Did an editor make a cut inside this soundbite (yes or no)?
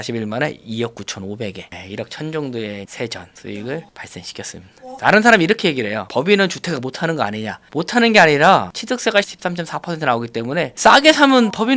yes